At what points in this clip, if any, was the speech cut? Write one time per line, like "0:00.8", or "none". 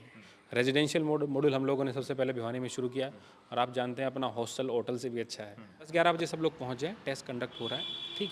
0:05.9